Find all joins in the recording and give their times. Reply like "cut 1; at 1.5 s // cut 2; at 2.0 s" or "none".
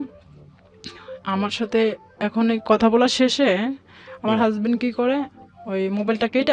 none